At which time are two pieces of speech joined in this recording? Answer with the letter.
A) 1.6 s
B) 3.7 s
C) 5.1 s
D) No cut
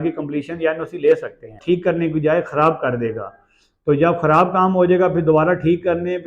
A